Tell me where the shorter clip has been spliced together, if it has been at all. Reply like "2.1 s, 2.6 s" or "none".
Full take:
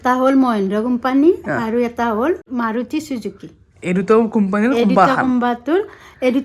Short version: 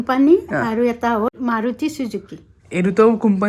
1.3 s